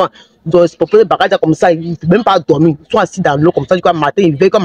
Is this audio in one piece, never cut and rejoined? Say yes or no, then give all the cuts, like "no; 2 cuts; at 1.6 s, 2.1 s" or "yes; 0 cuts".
yes; 0 cuts